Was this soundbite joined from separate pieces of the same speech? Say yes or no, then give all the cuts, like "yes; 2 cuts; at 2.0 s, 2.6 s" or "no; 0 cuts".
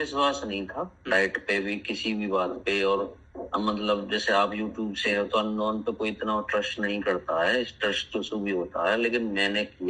no; 0 cuts